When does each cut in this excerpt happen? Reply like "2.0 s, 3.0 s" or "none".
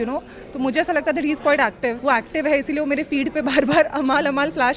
2.0 s